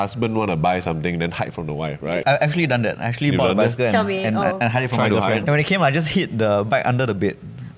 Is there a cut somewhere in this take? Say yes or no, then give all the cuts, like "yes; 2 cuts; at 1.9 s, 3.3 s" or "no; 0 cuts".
yes; 2 cuts; at 2.1 s, 5.4 s